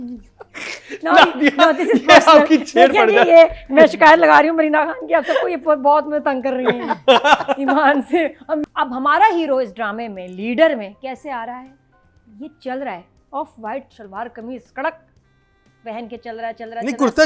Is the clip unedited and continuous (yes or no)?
no